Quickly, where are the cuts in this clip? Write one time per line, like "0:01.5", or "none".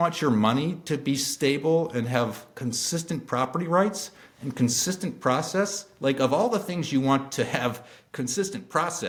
none